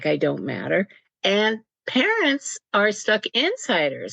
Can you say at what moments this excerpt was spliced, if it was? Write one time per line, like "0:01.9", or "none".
0:01.0